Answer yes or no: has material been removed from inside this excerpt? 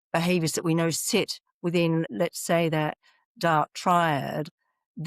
yes